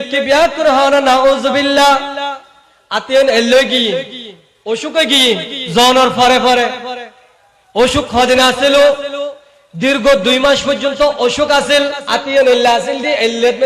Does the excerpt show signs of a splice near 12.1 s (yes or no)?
yes